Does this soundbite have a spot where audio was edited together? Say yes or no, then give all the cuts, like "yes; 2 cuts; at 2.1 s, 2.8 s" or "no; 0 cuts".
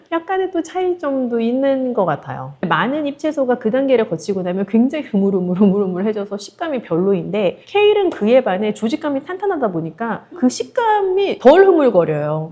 yes; 1 cut; at 2.7 s